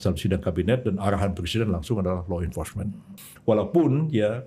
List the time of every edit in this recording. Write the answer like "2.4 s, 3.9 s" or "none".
3.1 s